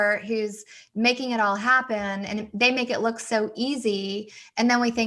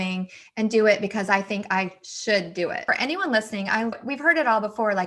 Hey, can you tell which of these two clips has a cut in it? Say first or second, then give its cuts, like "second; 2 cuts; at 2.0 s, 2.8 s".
second; 2 cuts; at 2.8 s, 4.0 s